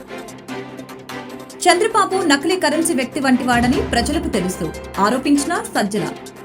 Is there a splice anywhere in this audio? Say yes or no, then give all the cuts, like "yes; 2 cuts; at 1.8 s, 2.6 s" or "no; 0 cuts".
yes; 1 cut; at 1.5 s